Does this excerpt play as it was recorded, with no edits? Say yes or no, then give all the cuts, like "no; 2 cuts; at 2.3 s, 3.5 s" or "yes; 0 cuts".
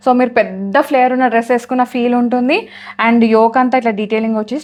yes; 0 cuts